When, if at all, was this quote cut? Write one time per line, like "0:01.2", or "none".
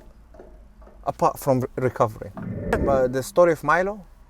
0:02.8